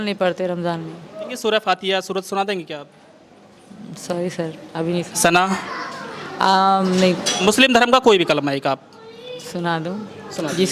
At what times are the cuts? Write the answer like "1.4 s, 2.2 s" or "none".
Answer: 1.3 s, 7.3 s